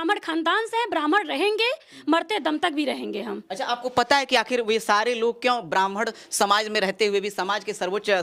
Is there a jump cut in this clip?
no; 0 cuts

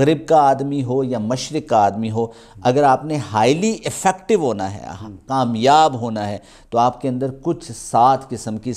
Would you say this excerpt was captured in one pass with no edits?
yes; 0 cuts

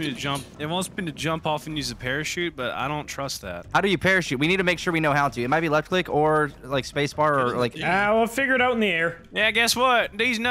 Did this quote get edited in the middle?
yes; 1 cut; at 3.6 s

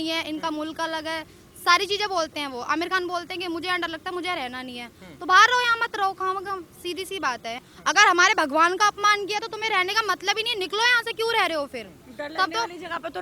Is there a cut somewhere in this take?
yes; 1 cut; at 7.6 s

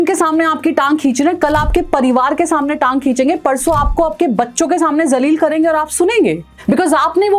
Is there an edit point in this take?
yes; 1 cut; at 6.5 s

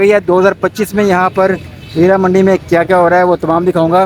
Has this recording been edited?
no; 0 cuts

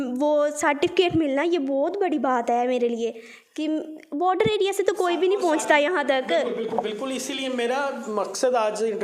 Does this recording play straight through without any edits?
yes; 0 cuts

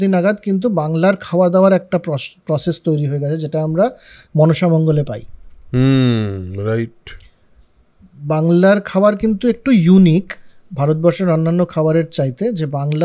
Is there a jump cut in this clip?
no; 0 cuts

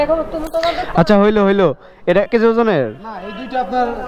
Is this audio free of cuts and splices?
no; 1 cut; at 2.3 s

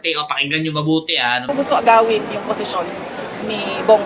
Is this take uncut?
no; 1 cut; at 1.5 s

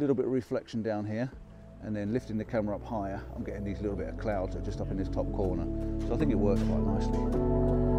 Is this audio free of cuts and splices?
yes; 0 cuts

